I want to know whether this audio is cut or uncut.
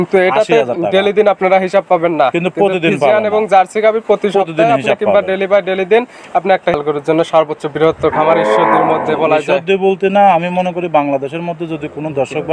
cut